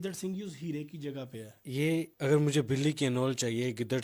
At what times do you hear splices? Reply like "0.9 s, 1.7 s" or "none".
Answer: 1.7 s